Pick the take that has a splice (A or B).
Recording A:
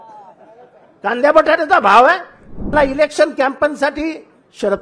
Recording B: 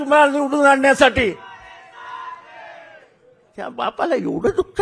A